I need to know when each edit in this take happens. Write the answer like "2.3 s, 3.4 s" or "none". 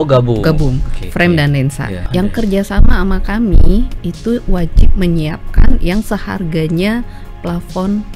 2.0 s